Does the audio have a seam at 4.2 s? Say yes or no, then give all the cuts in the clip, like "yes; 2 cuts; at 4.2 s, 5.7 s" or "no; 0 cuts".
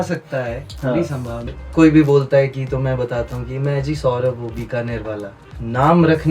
no; 2 cuts; at 1.6 s, 5.5 s